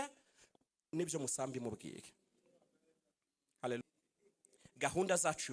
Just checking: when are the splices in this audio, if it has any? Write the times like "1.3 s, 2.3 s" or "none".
3.8 s